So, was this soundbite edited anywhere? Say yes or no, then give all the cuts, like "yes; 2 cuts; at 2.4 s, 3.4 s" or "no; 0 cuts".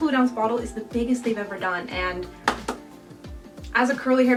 no; 0 cuts